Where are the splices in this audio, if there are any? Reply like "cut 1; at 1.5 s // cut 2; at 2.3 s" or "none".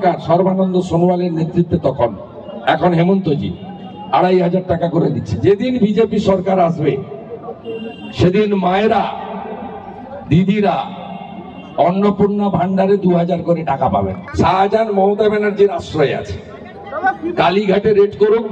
cut 1; at 14.2 s